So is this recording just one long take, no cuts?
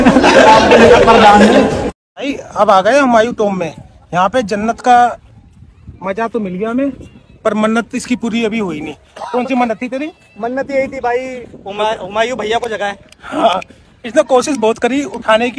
no; 1 cut; at 2.4 s

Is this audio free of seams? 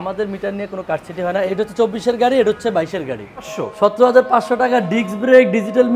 no; 2 cuts; at 1.5 s, 3.5 s

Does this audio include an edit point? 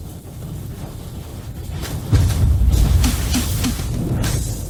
no; 0 cuts

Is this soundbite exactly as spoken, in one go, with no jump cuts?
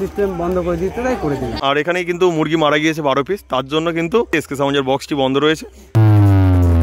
no; 3 cuts; at 1.7 s, 4.3 s, 5.9 s

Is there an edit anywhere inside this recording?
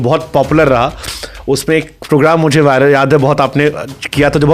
no; 0 cuts

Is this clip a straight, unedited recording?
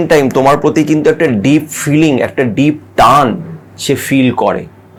yes; 0 cuts

